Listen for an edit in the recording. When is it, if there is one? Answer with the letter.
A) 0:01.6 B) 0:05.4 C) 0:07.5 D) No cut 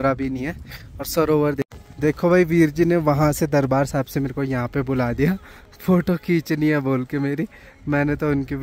A